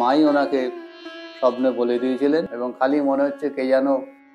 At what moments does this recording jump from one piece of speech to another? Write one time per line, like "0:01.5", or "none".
0:02.6